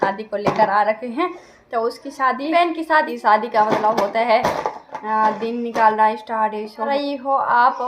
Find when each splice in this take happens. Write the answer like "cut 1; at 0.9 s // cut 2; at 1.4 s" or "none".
cut 1; at 3.0 s // cut 2; at 6.9 s